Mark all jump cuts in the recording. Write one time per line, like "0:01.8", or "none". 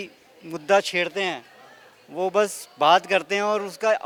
none